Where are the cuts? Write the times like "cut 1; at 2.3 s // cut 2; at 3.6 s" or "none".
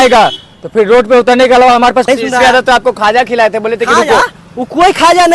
cut 1; at 2.1 s